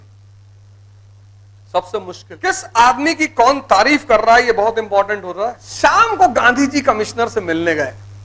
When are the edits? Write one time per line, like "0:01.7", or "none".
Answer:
0:02.2
0:05.6